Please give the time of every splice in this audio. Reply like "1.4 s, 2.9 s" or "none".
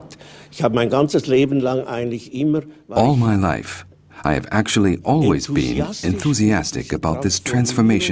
none